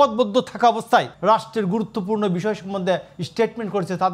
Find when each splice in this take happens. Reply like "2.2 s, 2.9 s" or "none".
1.1 s